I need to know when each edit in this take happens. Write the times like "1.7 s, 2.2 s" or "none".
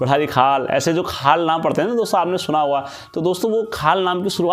none

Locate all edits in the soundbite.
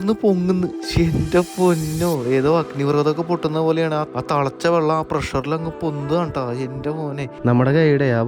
7.3 s

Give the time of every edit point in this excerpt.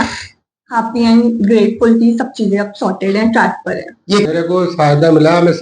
4.2 s

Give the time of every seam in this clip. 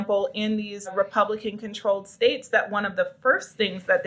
0.9 s

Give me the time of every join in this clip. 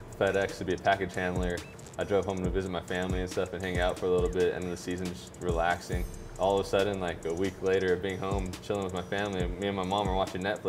1.8 s, 6.2 s

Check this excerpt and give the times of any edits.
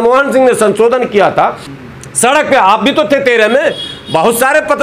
1.6 s

